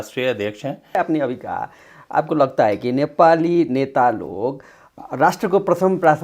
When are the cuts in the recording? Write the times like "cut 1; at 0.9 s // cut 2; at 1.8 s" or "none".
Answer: cut 1; at 0.9 s